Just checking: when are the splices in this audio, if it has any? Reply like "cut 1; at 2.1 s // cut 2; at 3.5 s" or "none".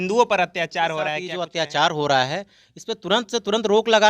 cut 1; at 1.4 s